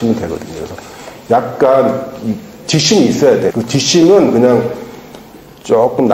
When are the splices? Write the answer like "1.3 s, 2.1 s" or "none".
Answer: 3.5 s